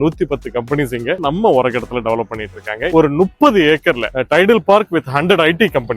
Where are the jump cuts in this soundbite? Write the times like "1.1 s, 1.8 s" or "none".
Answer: 1.2 s, 2.9 s